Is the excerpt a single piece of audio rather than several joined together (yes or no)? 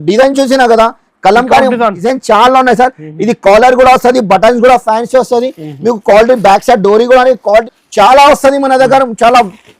no